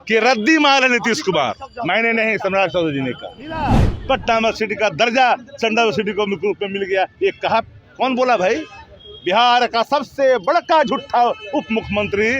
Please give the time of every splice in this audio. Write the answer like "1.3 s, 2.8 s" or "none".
3.9 s